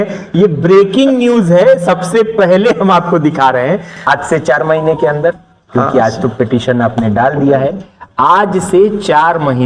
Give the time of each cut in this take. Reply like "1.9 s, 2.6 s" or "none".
4.0 s